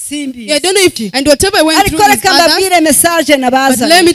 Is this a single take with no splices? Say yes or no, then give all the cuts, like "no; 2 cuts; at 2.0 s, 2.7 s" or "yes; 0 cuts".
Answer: no; 1 cut; at 1.0 s